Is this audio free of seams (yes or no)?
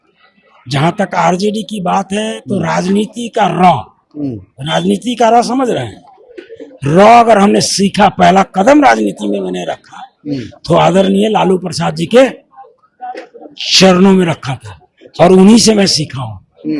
yes